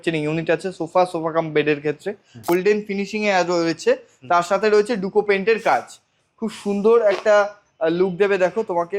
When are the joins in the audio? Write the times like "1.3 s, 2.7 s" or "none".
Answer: 2.4 s